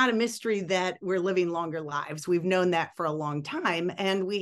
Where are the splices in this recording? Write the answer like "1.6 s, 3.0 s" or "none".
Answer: none